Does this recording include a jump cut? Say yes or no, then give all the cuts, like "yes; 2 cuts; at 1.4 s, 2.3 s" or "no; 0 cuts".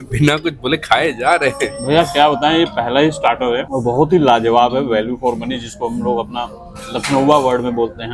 no; 0 cuts